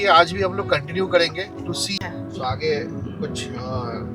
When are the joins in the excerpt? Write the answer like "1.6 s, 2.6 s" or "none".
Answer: 2.0 s